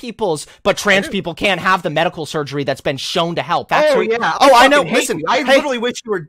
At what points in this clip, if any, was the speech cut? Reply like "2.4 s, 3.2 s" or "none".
3.7 s